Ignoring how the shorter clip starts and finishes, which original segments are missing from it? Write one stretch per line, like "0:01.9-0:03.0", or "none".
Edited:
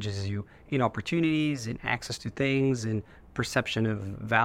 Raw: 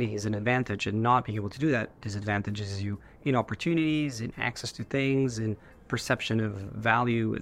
none